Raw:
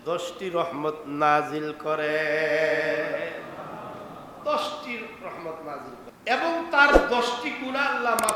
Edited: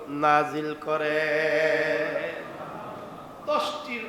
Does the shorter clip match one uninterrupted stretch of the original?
yes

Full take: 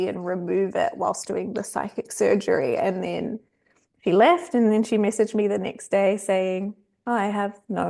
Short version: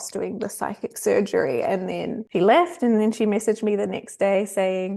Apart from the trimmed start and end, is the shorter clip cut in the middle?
yes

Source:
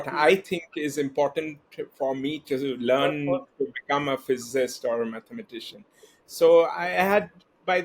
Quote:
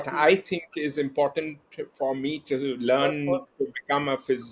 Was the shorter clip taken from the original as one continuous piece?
yes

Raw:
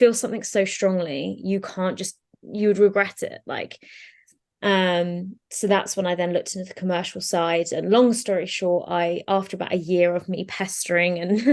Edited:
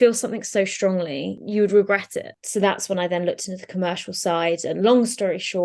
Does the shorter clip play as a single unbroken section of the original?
no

